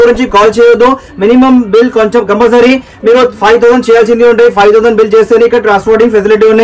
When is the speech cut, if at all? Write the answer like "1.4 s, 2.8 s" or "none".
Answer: none